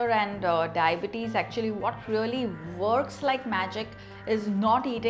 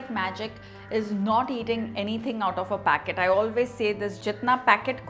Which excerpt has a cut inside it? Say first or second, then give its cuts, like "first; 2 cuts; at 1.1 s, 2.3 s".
second; 1 cut; at 4.1 s